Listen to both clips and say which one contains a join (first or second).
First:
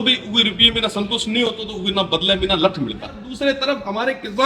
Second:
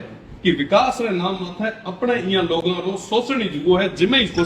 first